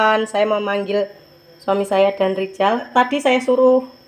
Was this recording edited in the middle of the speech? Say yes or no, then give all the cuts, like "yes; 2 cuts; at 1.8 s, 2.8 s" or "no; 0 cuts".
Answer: yes; 1 cut; at 2.9 s